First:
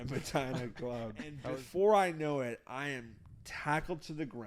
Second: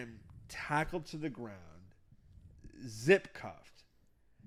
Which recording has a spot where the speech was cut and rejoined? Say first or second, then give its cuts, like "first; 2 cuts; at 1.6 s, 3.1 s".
first; 1 cut; at 1.3 s